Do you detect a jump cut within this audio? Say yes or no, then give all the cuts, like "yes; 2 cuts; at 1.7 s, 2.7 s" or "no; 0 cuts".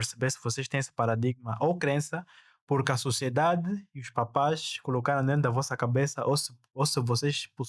no; 0 cuts